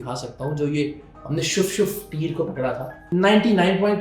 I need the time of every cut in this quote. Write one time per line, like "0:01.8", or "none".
0:03.1

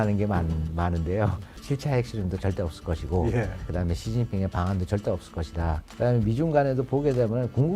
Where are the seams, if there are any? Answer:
0:01.7
0:03.8
0:05.9

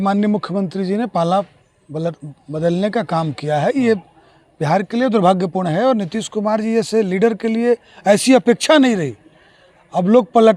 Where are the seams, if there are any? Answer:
none

